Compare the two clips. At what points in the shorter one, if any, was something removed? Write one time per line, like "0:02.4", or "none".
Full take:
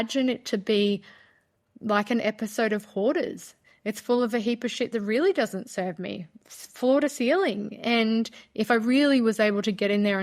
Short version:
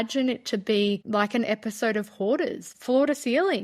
0:01.0
0:02.7